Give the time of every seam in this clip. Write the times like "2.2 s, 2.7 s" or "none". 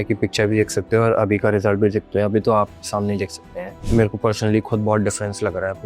3.7 s